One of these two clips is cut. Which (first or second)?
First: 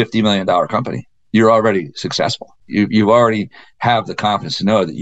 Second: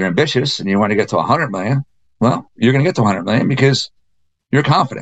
first